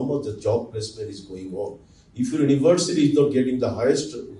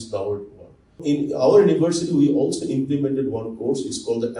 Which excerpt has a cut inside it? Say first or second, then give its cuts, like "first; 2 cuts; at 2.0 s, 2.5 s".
second; 1 cut; at 1.0 s